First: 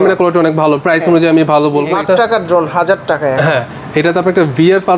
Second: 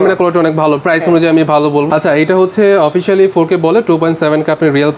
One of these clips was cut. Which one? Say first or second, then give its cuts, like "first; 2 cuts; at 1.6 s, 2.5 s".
first; 1 cut; at 1.9 s